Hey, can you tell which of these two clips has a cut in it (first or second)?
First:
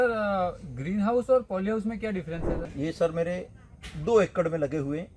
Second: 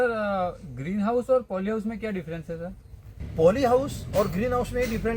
first